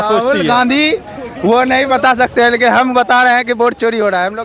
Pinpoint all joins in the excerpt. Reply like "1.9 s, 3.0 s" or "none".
none